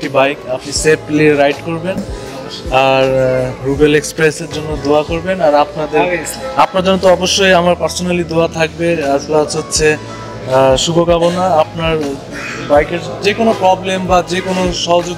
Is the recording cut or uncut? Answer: uncut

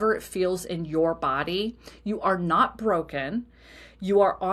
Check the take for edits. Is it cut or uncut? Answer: uncut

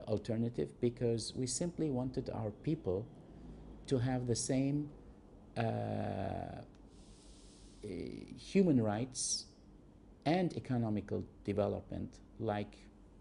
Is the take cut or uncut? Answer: uncut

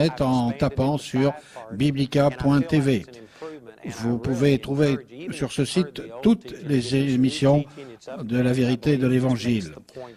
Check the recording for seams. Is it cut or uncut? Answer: cut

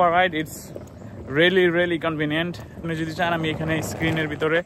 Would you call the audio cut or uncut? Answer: cut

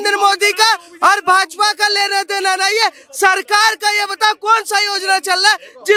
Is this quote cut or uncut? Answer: uncut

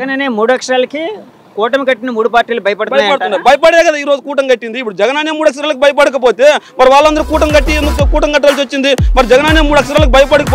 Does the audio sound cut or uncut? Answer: uncut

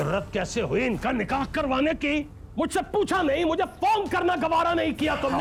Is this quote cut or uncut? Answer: uncut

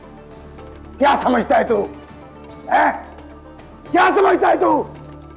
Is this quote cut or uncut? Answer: uncut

